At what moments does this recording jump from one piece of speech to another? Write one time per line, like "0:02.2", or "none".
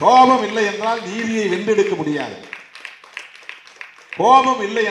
none